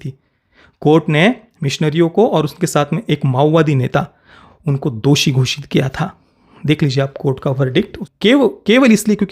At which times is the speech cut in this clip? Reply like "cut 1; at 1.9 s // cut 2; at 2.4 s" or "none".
cut 1; at 8.0 s